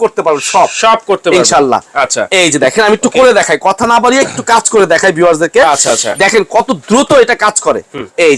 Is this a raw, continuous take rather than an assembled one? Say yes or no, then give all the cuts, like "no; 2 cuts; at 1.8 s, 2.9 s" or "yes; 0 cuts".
yes; 0 cuts